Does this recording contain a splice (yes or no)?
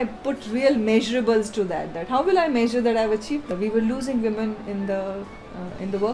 yes